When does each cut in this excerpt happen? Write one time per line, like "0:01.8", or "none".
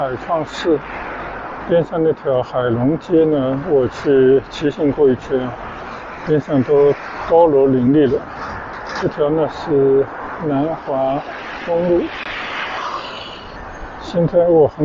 0:13.5